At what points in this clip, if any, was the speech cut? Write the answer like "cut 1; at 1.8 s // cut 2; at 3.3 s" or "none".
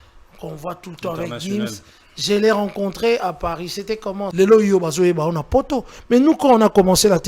cut 1; at 4.3 s